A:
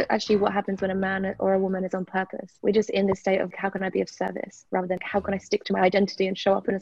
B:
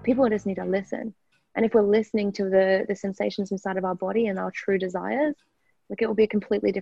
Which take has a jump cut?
A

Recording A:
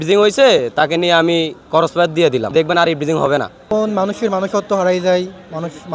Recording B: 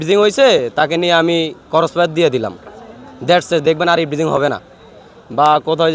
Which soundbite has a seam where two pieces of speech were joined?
A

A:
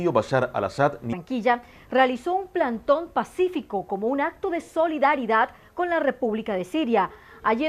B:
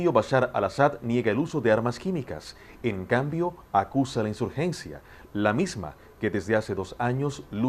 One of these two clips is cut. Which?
B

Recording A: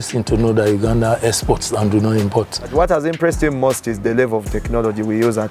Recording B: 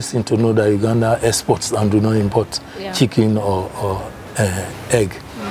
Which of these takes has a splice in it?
A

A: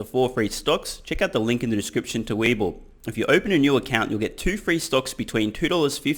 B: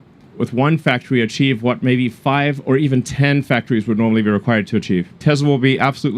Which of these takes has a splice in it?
B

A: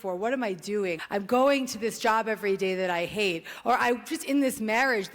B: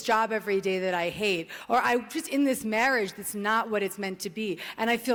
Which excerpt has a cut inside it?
A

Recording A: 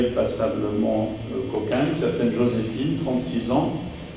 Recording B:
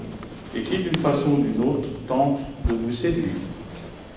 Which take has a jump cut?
A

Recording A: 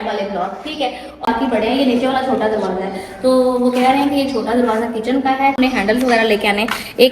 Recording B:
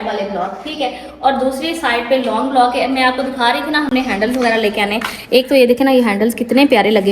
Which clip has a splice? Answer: A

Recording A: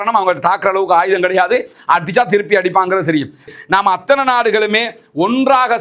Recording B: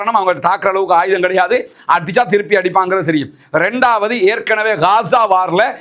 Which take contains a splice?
A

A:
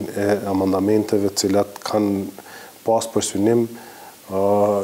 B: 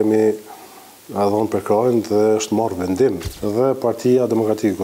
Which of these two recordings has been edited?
B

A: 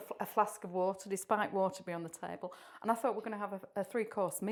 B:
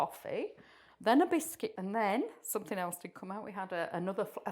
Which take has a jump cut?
B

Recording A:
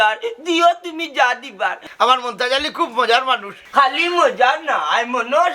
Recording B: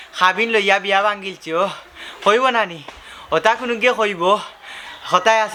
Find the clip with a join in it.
A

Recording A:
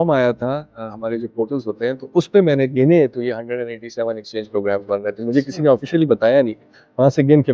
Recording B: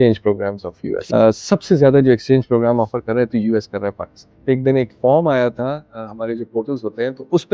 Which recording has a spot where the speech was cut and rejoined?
B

